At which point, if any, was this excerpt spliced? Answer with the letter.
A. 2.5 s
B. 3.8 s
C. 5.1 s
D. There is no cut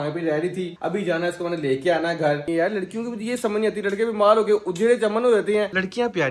A